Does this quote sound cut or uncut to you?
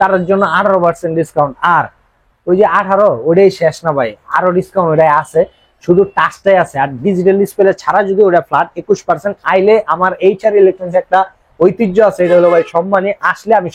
uncut